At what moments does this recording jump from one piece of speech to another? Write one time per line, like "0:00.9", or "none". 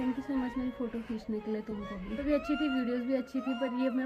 0:02.2